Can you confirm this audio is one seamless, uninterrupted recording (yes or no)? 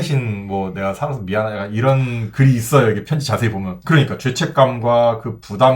no